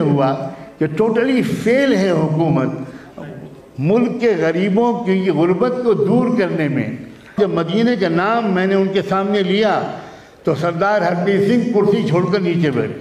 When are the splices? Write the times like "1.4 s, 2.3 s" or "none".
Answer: 7.3 s